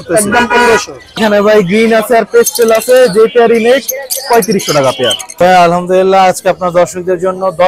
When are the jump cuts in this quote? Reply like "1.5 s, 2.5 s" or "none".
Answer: 1.2 s, 5.3 s